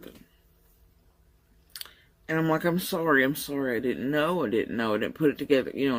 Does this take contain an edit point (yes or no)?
no